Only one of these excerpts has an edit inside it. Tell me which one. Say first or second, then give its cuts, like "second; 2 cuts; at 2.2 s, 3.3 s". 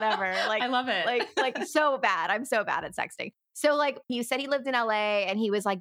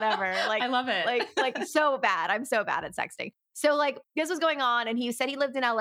first; 1 cut; at 4.1 s